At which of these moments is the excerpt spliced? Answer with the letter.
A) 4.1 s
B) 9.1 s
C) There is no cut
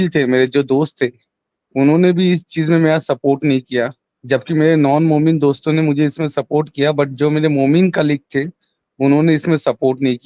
A